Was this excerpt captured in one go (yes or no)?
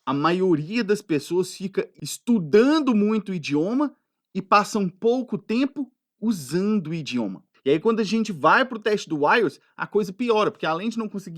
no